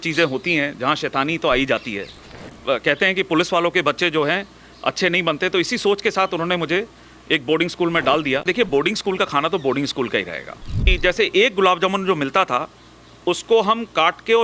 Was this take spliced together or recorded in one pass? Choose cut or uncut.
cut